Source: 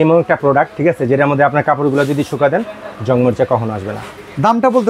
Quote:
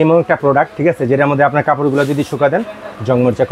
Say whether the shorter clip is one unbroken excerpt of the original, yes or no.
yes